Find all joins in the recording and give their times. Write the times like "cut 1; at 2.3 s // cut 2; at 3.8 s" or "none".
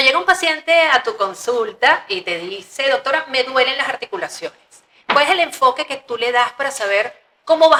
none